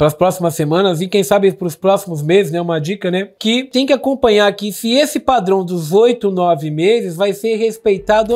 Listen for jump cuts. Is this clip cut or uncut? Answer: cut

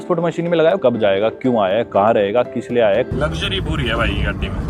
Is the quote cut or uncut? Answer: cut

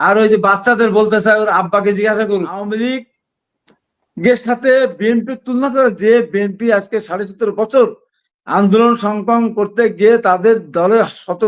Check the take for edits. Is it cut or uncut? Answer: cut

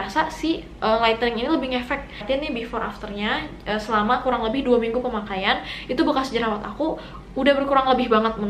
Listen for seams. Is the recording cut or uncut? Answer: cut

